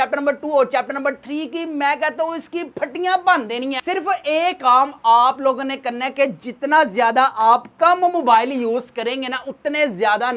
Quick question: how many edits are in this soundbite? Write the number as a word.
one